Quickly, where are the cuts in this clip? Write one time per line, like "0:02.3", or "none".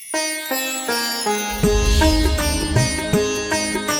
0:02.9